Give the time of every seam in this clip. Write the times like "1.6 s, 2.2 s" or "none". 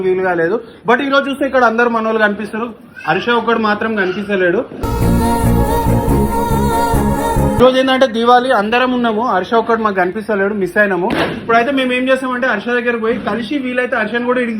7.6 s